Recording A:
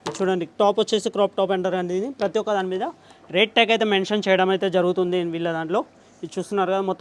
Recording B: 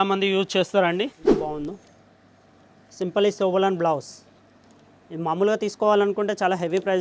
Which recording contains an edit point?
B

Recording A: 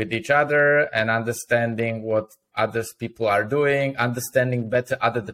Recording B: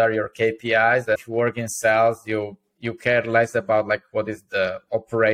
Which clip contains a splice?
B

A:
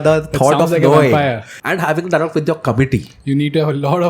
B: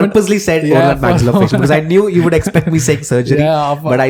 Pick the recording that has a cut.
A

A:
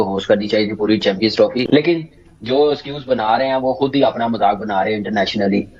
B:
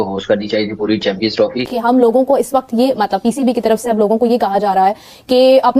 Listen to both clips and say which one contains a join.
B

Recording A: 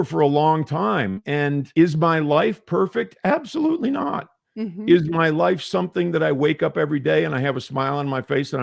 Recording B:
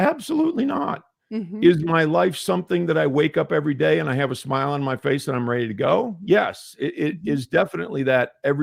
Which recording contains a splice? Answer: A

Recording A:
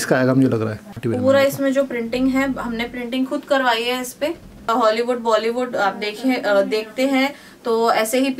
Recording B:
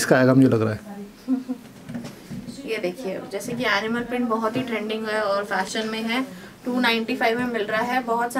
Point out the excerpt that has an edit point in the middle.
A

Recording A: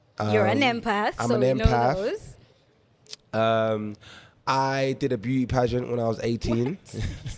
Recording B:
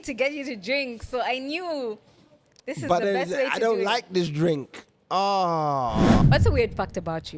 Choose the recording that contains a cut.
B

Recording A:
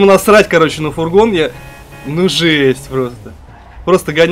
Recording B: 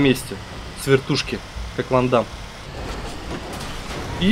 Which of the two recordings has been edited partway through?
B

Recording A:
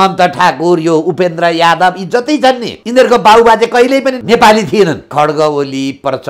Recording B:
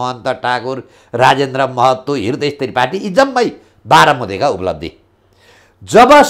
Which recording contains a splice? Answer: A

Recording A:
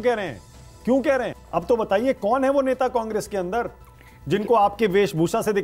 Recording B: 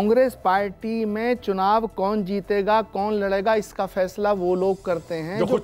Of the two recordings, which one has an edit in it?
A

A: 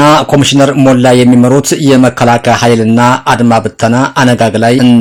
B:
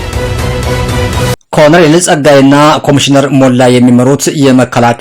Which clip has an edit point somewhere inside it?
B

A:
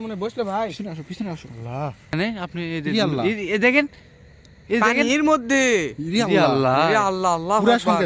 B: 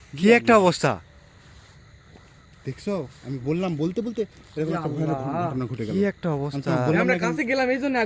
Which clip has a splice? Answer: A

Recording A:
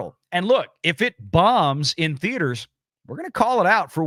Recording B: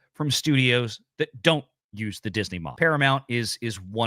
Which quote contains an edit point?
B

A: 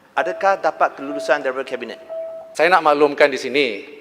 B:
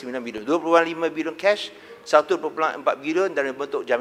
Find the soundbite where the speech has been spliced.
A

